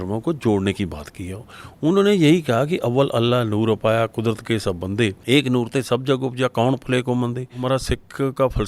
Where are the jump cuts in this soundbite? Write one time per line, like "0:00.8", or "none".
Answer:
0:05.2
0:07.6